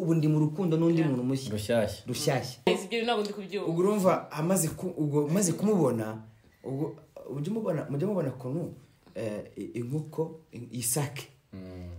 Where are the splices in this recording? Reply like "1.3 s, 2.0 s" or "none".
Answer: 2.7 s